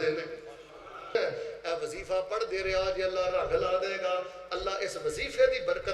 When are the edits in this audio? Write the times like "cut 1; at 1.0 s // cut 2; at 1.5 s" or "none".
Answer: cut 1; at 1.1 s